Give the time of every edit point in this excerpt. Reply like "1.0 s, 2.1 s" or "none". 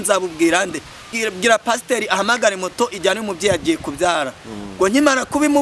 1.1 s